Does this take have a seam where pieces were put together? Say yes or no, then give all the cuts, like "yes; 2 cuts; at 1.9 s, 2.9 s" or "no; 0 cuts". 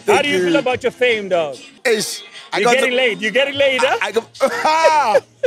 yes; 1 cut; at 1.7 s